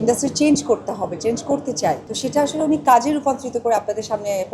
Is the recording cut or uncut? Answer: cut